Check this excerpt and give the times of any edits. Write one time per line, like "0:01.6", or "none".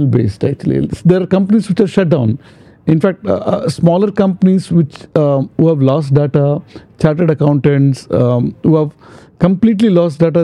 none